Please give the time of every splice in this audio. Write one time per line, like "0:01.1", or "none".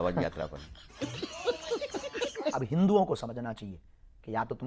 0:02.4